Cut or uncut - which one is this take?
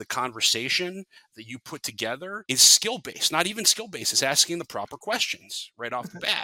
cut